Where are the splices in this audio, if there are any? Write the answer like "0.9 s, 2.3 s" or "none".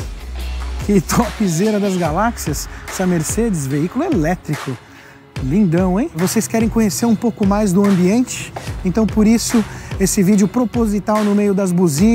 6.1 s